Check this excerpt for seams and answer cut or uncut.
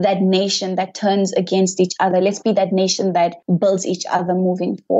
cut